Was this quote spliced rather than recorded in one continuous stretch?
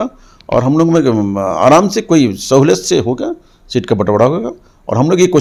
no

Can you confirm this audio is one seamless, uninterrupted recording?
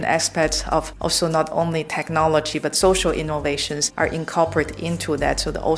no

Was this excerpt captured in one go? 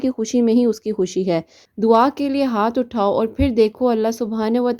no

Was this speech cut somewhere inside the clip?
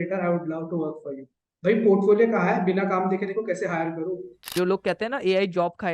yes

